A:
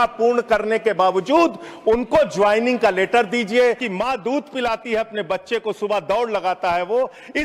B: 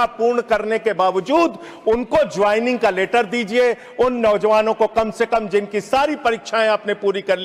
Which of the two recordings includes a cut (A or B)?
A